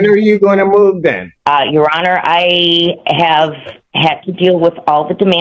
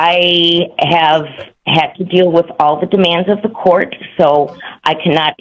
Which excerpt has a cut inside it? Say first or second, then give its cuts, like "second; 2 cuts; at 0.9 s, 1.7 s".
first; 1 cut; at 1.3 s